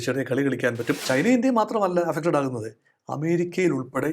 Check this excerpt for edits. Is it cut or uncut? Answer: cut